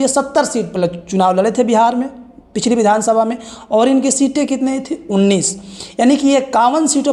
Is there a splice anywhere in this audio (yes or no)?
no